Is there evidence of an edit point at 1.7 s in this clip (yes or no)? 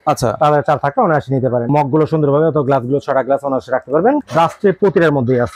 yes